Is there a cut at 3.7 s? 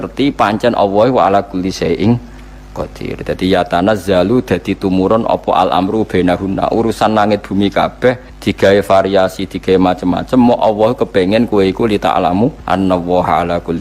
no; 2 cuts; at 8.3 s, 12.6 s

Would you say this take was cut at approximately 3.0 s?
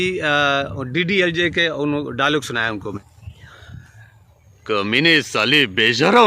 yes; 1 cut; at 3.0 s

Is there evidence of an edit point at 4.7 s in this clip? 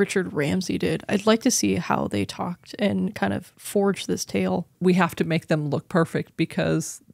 yes; 1 cut; at 4.7 s

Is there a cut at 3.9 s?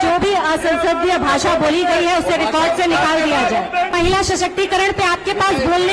yes; 1 cut; at 3.9 s

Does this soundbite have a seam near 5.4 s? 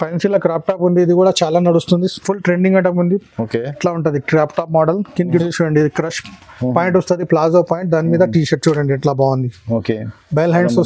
yes; 1 cut; at 5.4 s

